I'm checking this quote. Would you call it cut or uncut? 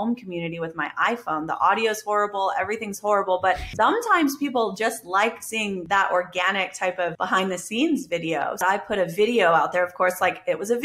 cut